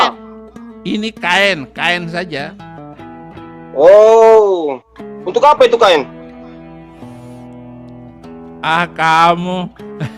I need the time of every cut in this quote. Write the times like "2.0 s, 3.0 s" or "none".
none